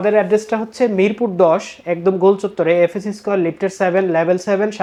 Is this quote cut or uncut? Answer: uncut